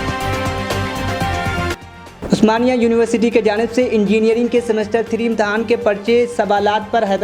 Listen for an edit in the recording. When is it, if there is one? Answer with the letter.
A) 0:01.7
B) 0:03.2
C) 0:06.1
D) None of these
D